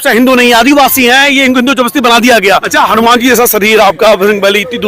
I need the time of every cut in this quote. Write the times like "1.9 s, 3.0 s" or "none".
2.7 s